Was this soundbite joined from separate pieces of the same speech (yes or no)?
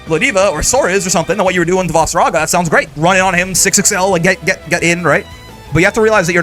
no